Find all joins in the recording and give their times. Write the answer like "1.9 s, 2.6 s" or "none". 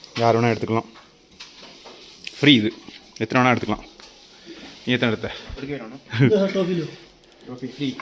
none